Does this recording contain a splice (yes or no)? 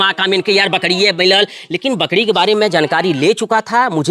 no